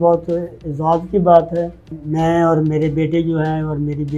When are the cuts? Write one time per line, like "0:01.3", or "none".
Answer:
0:01.9